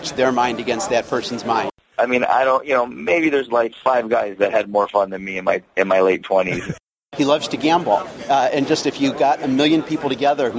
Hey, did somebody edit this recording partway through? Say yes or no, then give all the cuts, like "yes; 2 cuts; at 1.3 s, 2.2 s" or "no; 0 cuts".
yes; 2 cuts; at 1.7 s, 6.8 s